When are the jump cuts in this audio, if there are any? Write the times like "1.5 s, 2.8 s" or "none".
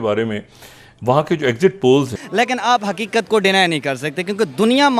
2.2 s